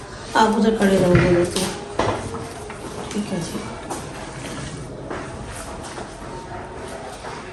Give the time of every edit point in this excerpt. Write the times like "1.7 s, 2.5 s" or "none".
none